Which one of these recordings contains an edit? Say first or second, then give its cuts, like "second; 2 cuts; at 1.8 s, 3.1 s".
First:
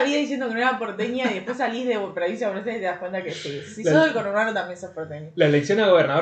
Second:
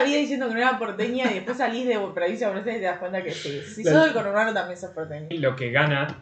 second; 1 cut; at 5.3 s